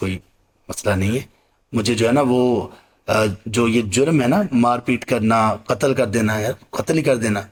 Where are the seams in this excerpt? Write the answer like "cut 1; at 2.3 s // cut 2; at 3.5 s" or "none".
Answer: none